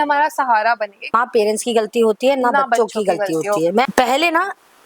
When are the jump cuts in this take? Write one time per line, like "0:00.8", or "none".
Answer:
0:01.0
0:03.9